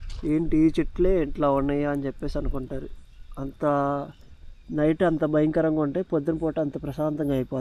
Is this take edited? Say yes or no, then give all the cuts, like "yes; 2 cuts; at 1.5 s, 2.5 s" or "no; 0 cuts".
no; 0 cuts